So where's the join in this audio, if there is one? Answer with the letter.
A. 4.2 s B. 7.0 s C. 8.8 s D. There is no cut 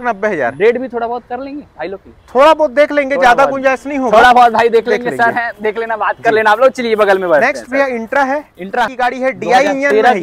C